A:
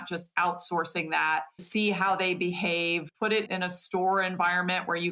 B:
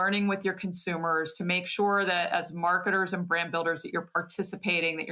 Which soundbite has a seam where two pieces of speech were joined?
A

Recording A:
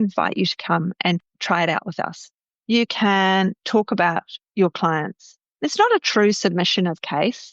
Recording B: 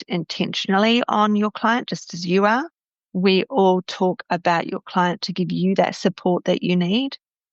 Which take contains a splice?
A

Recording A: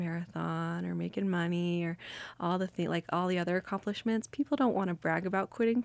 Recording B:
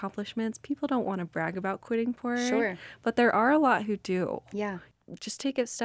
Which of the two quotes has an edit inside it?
B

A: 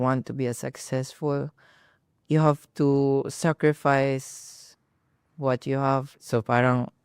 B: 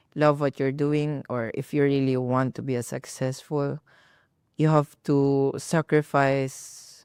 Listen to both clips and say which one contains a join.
A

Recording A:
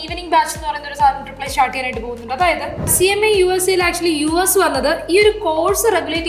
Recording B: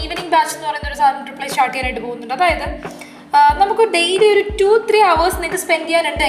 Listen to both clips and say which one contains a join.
A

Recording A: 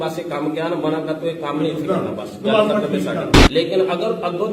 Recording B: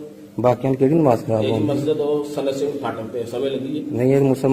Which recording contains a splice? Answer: A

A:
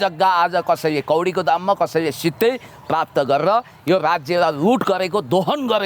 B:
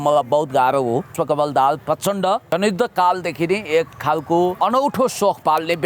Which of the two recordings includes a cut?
B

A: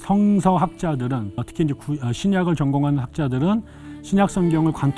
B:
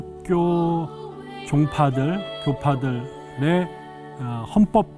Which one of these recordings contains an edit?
A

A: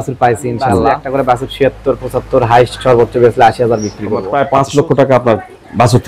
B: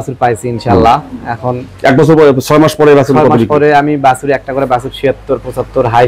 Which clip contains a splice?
A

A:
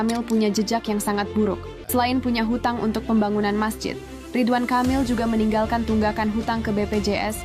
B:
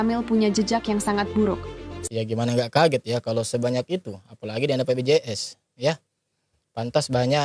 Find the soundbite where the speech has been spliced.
A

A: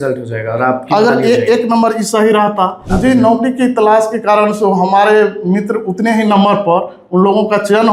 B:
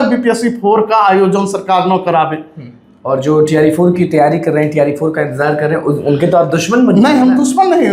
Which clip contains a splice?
A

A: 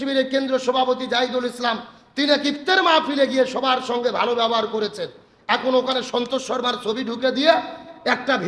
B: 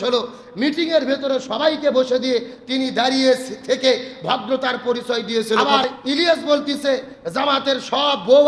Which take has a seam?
B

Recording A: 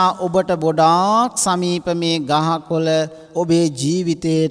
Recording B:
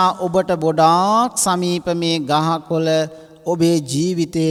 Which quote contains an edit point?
A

